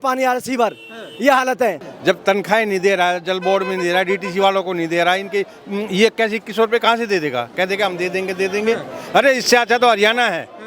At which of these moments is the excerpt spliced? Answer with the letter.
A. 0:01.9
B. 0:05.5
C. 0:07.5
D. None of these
A